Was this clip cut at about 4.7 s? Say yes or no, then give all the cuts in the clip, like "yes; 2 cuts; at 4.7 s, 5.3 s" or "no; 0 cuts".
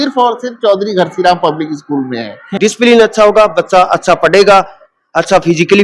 no; 1 cut; at 2.5 s